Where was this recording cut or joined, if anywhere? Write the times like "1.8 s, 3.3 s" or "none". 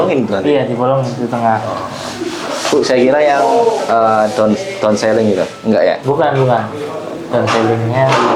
none